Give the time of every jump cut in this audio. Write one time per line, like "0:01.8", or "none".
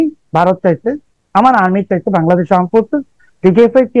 0:01.1